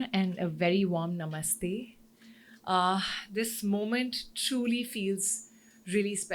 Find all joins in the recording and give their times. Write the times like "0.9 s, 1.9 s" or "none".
none